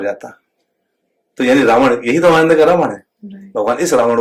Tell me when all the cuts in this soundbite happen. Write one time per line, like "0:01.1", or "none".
none